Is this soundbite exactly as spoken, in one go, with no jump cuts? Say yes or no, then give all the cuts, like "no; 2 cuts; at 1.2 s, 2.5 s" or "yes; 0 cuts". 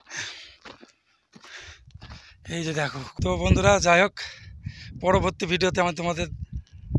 no; 1 cut; at 3.2 s